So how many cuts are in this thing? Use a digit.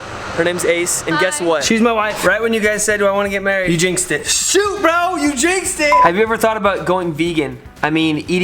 2